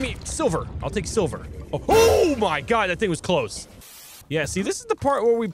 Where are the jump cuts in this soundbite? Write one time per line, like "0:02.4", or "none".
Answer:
0:03.7